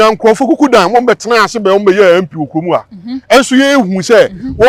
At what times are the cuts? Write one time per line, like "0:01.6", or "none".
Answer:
none